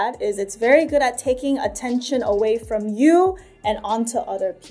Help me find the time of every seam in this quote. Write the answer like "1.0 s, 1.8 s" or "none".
none